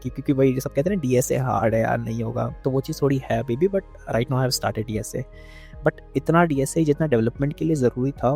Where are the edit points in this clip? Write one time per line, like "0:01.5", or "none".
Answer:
0:02.5